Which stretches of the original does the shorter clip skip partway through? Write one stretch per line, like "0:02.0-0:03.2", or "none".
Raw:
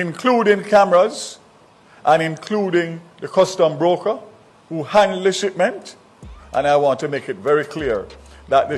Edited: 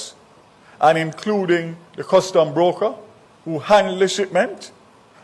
none